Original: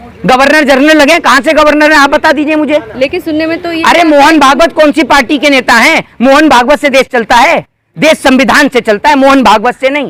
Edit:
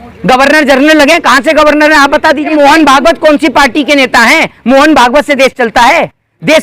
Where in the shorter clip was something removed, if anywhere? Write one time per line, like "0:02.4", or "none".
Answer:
0:02.5